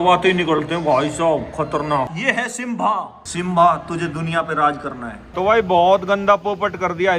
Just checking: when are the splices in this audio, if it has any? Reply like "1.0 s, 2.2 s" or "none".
2.1 s, 5.3 s